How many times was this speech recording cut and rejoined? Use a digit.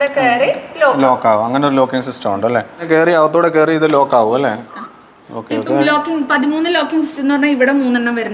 0